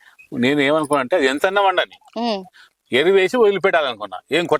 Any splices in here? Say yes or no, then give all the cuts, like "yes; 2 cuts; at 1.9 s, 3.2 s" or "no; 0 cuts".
no; 0 cuts